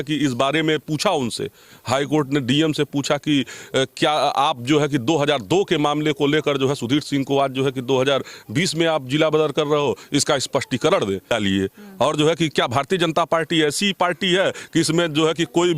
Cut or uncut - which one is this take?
cut